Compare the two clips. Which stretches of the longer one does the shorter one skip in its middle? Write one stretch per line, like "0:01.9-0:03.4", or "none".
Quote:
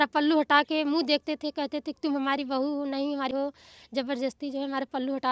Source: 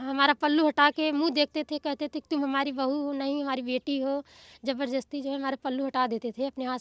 0:03.6-0:04.0